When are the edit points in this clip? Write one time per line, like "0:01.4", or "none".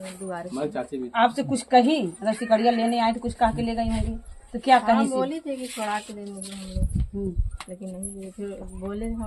none